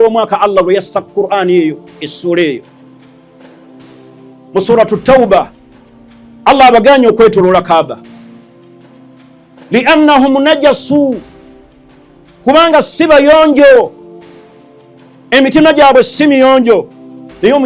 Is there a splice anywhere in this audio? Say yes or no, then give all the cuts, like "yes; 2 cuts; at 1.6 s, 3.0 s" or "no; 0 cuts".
no; 0 cuts